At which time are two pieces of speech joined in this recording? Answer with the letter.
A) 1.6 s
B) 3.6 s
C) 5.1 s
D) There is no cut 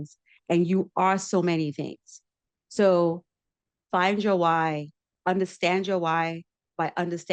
C